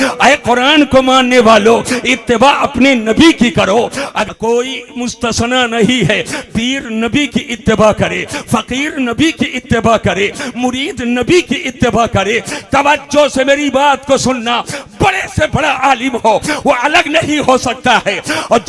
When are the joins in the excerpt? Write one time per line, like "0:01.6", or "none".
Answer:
0:04.1